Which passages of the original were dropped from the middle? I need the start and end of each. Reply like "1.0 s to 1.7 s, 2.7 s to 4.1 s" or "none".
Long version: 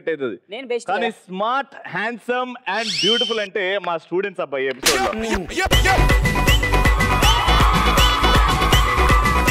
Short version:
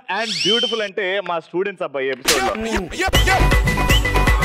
none